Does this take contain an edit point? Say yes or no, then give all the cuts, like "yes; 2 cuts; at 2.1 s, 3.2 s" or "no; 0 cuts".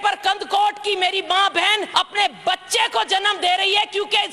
yes; 1 cut; at 1.9 s